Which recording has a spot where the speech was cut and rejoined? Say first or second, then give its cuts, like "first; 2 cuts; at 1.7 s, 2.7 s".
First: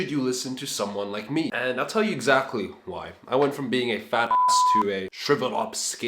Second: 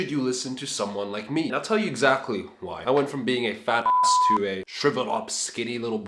second; 2 cuts; at 1.5 s, 2.7 s